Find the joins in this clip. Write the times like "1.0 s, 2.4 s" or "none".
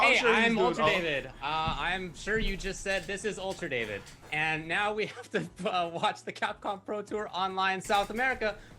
1.1 s